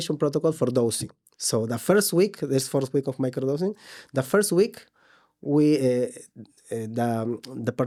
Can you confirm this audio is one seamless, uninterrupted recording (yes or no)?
yes